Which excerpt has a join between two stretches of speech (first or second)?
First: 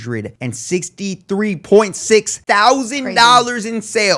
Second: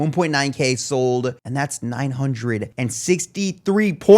second